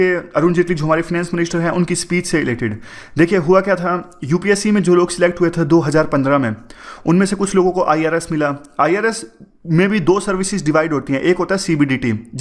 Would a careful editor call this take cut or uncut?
uncut